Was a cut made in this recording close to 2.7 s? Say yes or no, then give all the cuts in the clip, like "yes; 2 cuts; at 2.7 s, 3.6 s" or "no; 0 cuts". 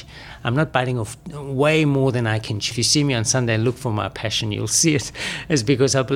yes; 1 cut; at 2.7 s